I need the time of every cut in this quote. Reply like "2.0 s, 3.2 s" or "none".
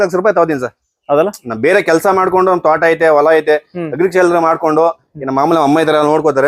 none